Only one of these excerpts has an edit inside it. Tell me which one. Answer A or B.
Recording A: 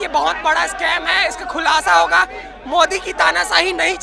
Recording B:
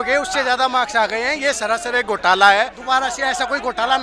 B